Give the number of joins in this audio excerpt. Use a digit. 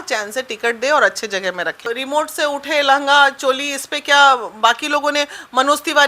1